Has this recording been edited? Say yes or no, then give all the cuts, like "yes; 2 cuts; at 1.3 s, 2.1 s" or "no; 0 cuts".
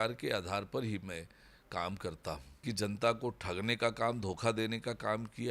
yes; 1 cut; at 2.6 s